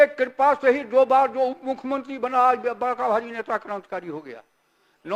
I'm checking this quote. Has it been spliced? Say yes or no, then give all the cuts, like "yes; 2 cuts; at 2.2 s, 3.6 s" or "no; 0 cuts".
no; 0 cuts